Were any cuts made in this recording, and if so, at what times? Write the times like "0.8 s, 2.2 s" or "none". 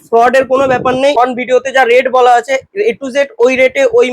1.1 s